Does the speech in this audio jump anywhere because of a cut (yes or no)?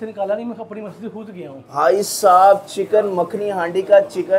yes